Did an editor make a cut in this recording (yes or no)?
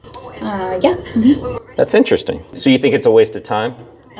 yes